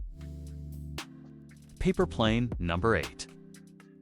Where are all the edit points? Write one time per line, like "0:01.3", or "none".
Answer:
0:01.7
0:03.1